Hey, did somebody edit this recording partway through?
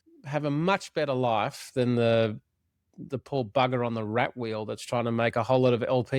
no; 0 cuts

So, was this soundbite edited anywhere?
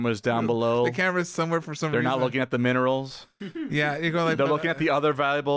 no; 0 cuts

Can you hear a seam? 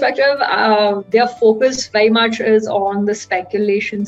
no; 0 cuts

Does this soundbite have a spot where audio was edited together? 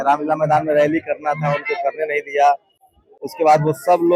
no; 0 cuts

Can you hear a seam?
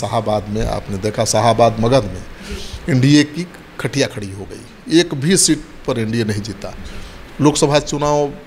no; 0 cuts

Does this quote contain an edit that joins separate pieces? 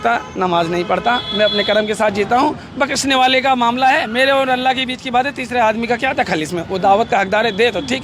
no; 0 cuts

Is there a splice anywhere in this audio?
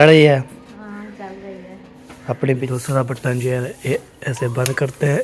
yes; 1 cut; at 2.6 s

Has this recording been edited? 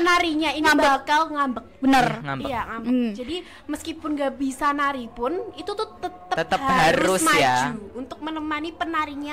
no; 0 cuts

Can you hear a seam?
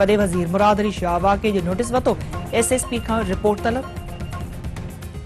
no; 0 cuts

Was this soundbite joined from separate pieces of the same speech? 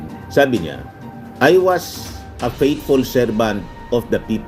no; 0 cuts

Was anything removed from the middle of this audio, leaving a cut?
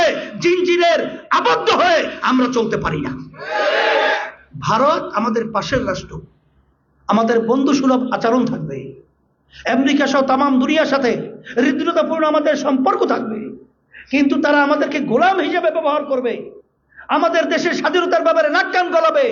no; 0 cuts

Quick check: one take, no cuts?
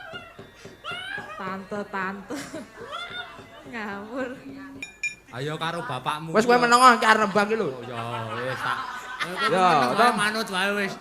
no; 1 cut; at 4.8 s

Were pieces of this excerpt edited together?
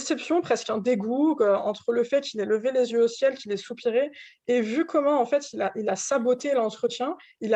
no; 0 cuts

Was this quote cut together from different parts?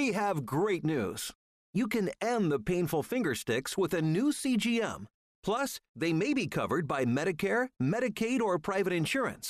no; 0 cuts

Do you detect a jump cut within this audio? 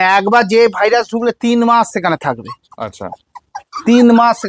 no; 0 cuts

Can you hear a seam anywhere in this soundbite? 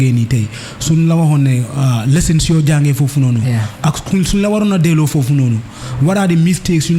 no; 0 cuts

